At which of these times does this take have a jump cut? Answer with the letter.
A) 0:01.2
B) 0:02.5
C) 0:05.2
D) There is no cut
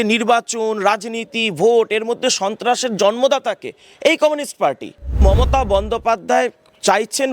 C